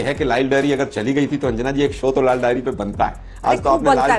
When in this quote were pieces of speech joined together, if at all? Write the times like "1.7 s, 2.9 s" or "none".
none